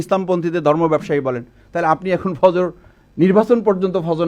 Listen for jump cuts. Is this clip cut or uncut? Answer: uncut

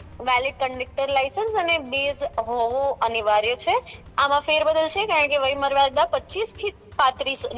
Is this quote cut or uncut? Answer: cut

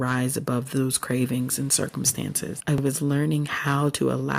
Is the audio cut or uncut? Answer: cut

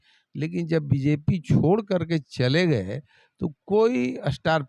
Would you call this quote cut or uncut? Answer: uncut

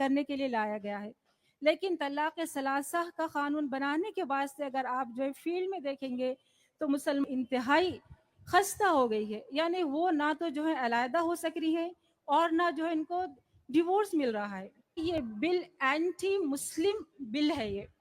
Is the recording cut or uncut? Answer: cut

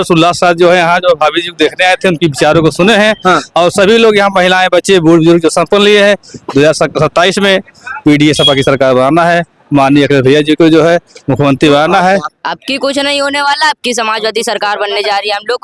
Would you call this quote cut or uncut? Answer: cut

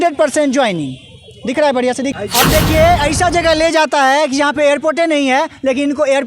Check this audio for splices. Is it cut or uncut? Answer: cut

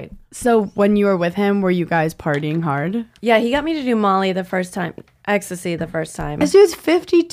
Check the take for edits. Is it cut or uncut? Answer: cut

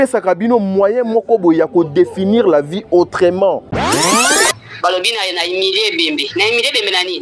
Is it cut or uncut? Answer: cut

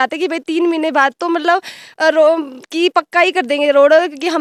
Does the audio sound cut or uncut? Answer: uncut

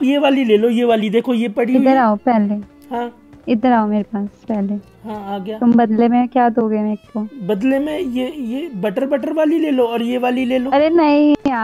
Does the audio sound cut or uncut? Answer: uncut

